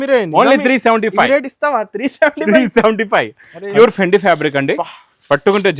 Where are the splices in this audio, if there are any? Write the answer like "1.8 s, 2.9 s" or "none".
3.7 s